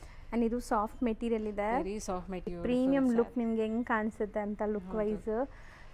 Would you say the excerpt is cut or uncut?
cut